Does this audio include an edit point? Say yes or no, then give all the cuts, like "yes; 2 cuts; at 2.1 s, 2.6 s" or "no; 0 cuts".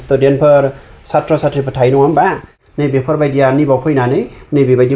yes; 1 cut; at 2.6 s